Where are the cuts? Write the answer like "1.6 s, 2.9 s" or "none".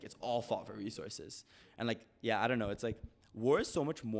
none